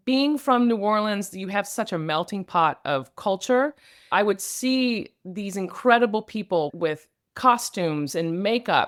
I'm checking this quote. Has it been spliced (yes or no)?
no